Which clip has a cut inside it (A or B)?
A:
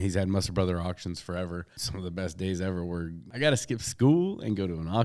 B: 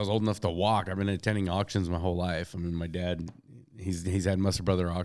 A